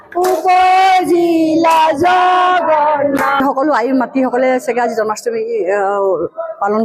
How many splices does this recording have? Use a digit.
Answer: 1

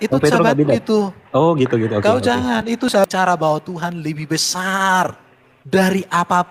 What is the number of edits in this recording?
1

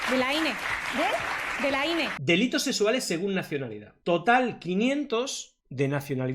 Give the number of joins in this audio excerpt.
2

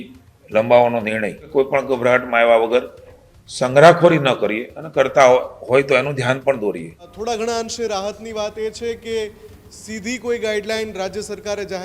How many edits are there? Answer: 2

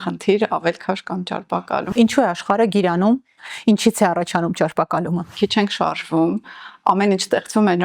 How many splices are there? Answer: 2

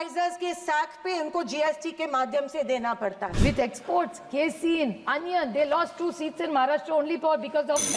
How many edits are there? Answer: 1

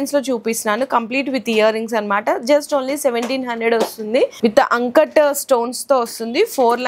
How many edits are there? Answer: 1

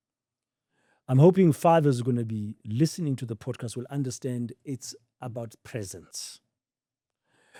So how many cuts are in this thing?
0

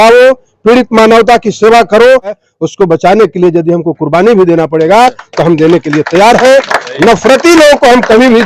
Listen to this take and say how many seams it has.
1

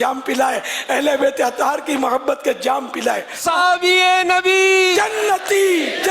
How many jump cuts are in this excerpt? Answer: 1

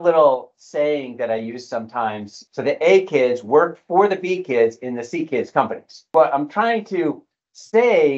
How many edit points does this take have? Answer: 2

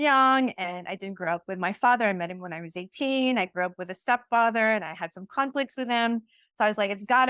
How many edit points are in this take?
0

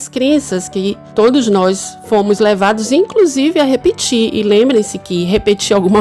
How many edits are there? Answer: 0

